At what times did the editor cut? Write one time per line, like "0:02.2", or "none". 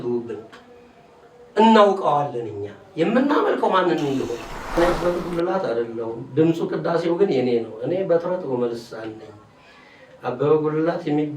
0:04.8